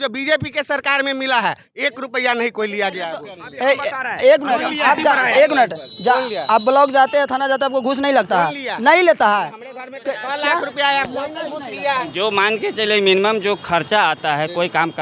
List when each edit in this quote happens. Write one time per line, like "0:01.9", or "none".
none